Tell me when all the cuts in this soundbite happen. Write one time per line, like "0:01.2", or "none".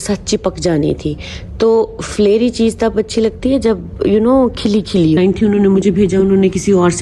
0:05.2

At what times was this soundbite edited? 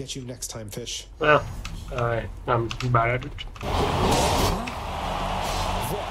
0:01.0
0:03.6

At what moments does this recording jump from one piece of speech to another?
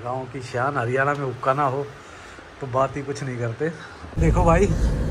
0:04.2

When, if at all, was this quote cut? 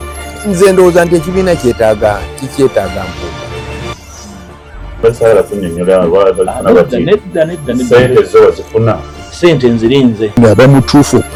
none

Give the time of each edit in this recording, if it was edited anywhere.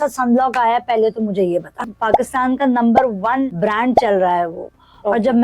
0:01.9
0:03.5

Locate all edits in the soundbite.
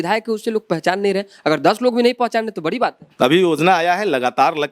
0:03.0

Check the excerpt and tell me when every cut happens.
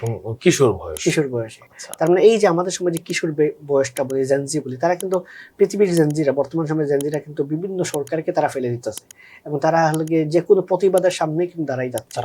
none

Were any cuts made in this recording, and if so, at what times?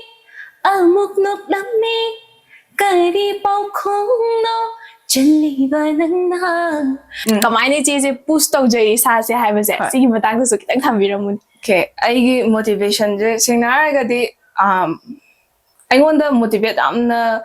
0:07.1

